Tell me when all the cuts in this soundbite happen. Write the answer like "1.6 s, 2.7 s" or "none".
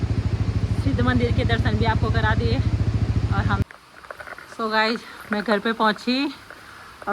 3.6 s